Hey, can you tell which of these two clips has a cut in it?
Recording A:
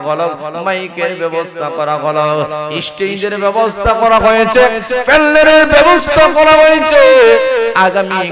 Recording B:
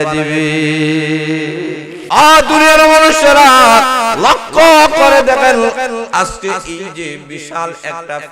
B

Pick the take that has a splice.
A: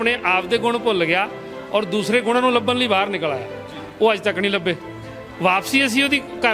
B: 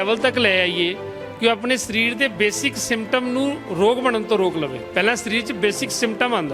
B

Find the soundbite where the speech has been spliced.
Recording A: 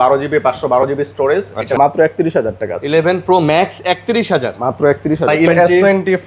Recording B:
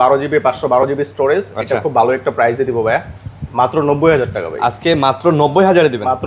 A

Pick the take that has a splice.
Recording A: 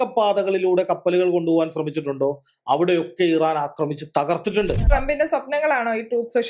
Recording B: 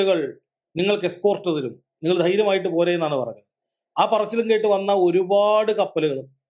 A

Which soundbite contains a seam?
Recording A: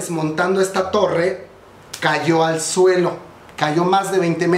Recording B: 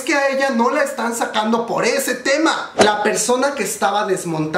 B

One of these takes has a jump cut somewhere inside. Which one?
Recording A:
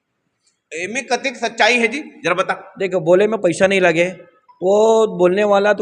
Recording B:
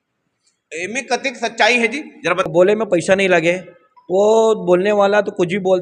B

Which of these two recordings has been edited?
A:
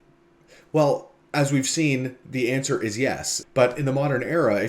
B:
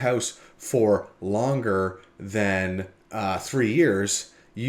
A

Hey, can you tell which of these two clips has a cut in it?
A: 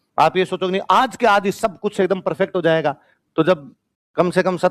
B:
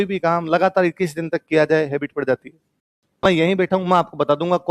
B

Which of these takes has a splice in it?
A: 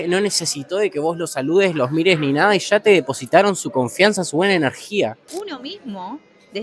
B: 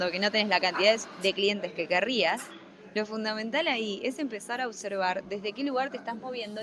A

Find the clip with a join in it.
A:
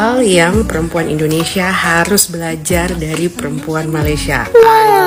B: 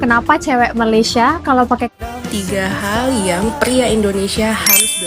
B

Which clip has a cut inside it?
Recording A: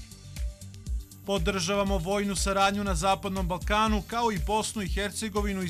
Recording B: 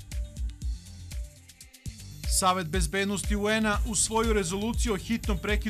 B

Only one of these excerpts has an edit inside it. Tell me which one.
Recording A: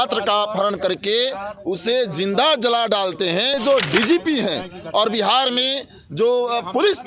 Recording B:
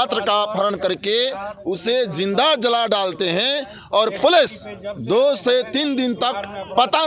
A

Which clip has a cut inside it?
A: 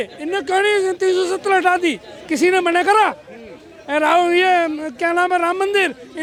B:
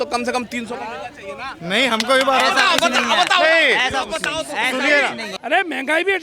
B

